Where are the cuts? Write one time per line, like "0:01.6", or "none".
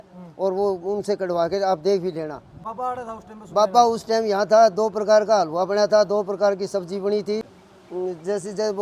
0:07.4